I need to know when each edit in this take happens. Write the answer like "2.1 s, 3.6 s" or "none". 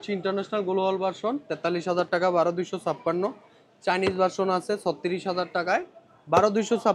none

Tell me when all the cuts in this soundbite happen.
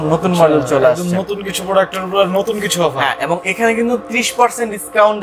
none

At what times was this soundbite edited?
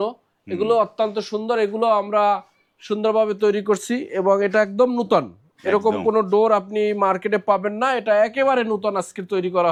none

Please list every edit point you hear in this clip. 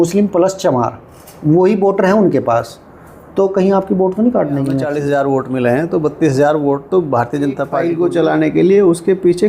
4.9 s, 7.8 s

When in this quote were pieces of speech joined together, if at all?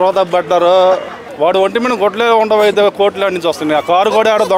1.2 s

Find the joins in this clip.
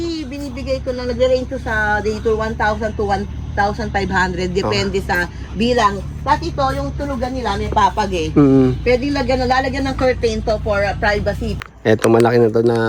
11.5 s

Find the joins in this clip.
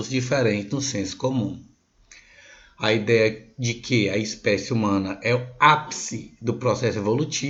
none

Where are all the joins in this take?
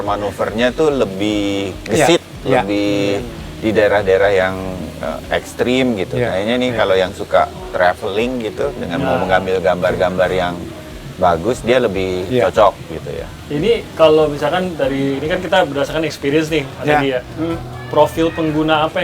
none

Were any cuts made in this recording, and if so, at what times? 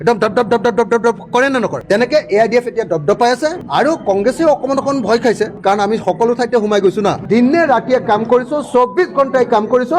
3.6 s, 7.2 s

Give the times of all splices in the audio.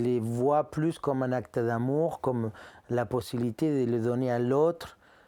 none

